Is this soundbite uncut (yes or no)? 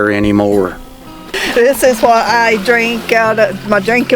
no